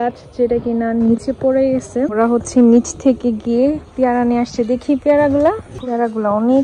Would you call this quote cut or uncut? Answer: cut